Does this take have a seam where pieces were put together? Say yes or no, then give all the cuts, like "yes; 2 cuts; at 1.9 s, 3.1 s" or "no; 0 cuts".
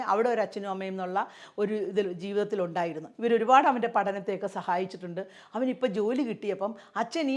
no; 0 cuts